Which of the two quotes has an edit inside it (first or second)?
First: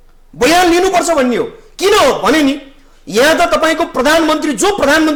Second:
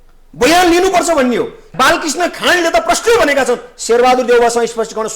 second